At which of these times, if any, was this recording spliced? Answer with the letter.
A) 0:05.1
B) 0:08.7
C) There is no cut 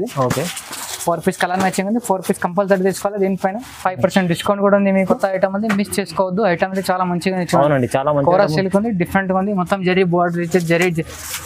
A